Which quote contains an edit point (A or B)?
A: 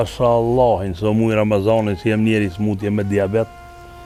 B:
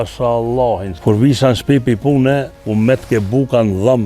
B